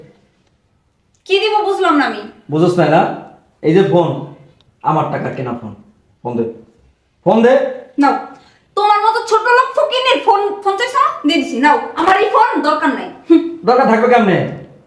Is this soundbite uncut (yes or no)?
yes